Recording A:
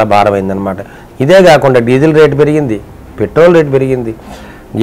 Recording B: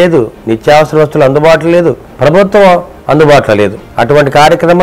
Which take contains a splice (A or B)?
B